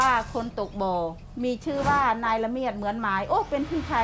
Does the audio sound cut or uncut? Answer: cut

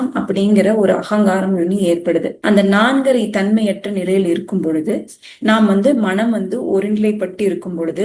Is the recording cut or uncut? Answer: uncut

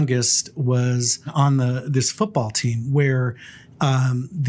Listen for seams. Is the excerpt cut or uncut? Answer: cut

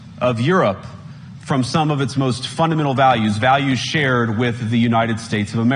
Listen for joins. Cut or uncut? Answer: uncut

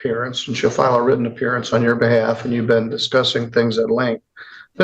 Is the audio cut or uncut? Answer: uncut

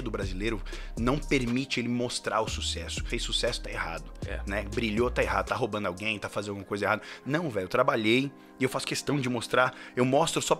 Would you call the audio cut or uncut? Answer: cut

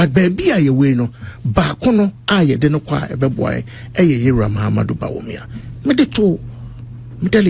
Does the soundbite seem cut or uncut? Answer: uncut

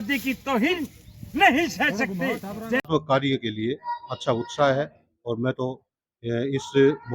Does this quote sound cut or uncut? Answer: cut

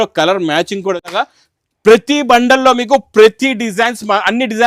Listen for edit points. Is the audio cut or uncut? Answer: cut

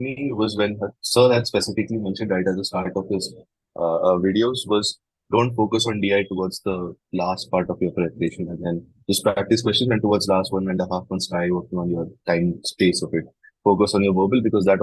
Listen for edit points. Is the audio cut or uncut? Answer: uncut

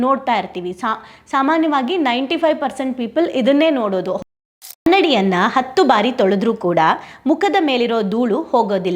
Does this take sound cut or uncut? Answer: cut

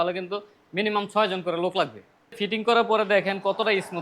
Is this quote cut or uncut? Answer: cut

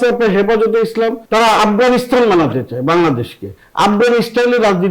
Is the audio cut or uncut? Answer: uncut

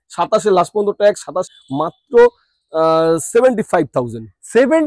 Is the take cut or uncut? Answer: cut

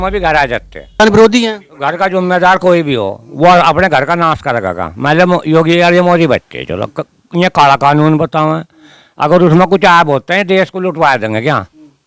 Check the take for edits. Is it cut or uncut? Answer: cut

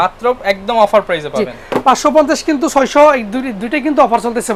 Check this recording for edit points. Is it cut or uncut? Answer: uncut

